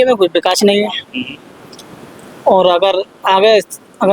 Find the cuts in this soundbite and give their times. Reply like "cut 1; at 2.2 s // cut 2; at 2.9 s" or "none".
none